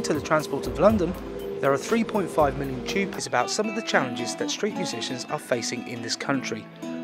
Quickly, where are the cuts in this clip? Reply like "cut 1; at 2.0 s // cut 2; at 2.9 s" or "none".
none